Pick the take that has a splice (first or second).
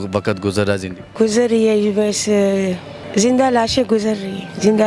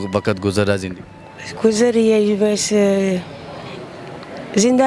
first